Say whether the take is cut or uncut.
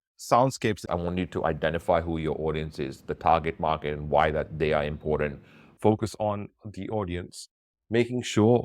cut